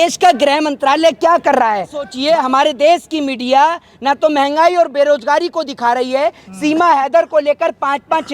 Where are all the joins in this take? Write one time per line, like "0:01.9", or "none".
0:02.1